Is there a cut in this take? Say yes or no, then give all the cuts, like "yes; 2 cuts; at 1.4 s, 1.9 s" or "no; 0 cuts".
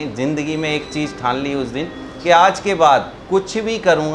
yes; 1 cut; at 3.2 s